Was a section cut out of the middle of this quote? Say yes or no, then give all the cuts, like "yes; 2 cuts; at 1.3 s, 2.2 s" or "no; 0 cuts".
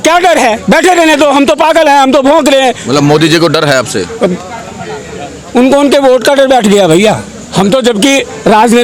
no; 0 cuts